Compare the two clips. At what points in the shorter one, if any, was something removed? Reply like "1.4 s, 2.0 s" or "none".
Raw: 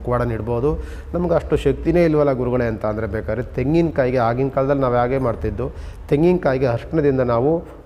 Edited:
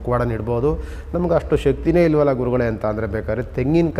none